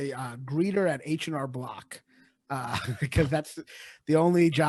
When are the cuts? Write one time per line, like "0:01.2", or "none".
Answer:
none